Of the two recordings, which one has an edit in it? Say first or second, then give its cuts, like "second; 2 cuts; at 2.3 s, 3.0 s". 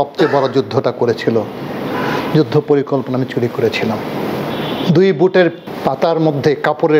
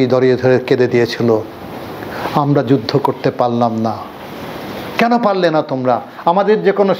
first; 2 cuts; at 4.5 s, 5.7 s